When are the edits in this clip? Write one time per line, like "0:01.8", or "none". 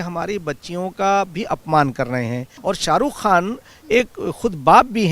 0:02.5